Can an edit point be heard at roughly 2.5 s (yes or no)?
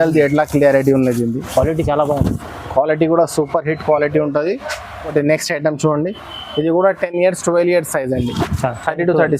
no